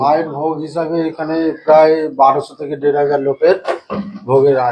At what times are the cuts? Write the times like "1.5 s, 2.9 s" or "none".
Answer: none